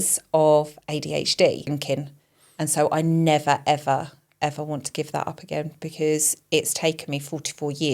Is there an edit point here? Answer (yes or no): yes